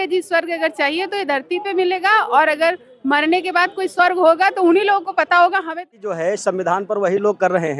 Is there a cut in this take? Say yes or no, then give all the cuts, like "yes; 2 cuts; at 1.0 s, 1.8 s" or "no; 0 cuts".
yes; 1 cut; at 6.0 s